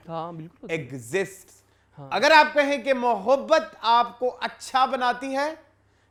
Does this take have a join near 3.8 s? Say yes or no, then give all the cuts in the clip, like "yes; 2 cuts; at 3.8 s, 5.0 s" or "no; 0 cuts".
no; 0 cuts